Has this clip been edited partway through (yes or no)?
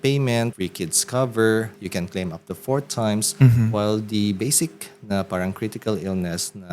no